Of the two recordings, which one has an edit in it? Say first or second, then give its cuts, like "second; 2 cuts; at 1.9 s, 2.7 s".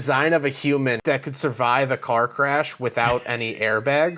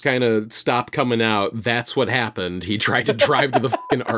first; 1 cut; at 1.0 s